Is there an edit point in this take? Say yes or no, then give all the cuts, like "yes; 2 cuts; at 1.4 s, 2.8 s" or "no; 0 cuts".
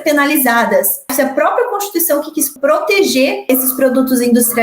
yes; 3 cuts; at 1.1 s, 2.5 s, 3.5 s